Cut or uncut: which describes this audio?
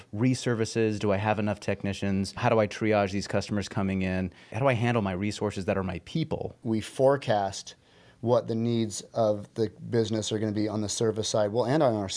cut